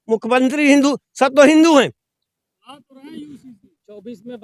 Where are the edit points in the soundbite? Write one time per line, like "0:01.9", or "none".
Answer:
none